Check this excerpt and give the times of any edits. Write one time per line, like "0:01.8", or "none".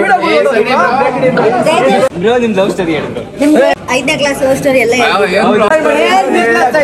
0:02.1
0:03.7
0:05.7